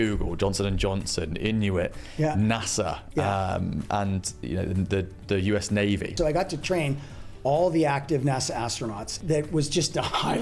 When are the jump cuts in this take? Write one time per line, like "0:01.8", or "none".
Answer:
0:06.1
0:09.2

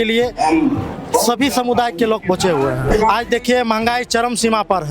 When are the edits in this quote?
0:02.9

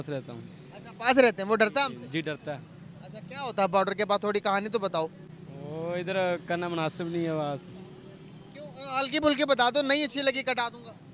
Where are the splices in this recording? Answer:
none

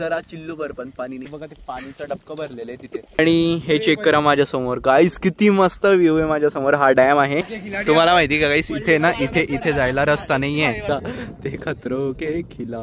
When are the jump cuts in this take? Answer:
0:01.3
0:03.2
0:07.6
0:10.9

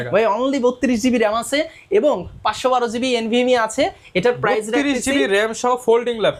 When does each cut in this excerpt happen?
none

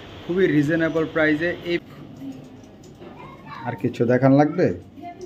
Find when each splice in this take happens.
0:01.8

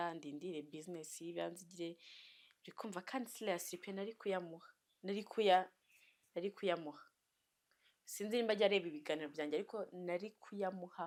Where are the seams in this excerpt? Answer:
none

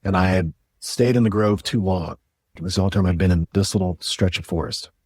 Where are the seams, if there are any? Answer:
0:02.3

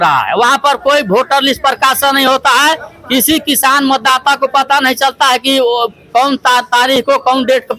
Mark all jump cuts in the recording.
none

